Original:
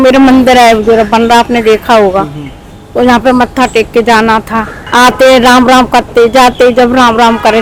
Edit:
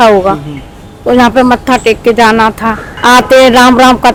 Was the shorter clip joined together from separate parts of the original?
no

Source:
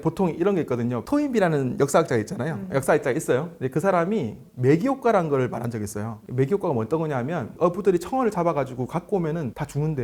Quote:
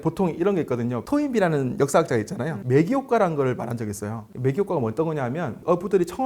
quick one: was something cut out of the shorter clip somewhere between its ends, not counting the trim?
yes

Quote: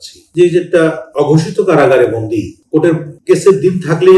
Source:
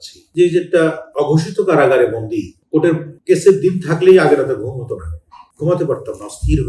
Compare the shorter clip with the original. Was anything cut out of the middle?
no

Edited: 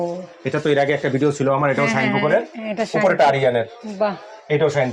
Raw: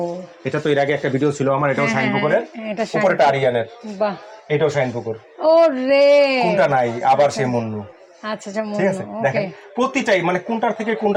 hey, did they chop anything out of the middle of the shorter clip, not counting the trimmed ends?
no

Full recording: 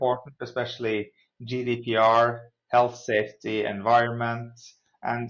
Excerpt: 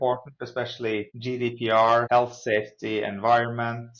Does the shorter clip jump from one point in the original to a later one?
yes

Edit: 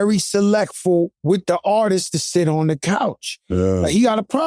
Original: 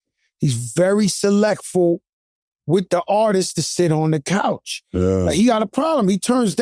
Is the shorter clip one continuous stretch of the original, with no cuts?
no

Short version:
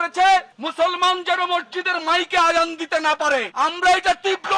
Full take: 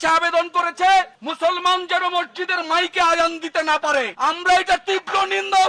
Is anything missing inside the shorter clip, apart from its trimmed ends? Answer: no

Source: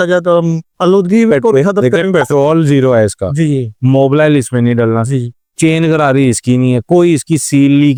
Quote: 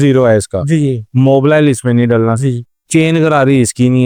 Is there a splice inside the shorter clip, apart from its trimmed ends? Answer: no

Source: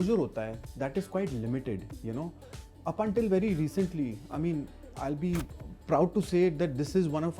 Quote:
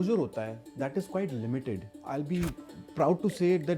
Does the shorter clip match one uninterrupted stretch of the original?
no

